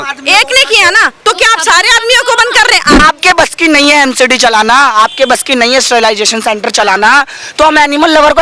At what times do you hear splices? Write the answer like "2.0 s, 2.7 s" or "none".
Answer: 3.0 s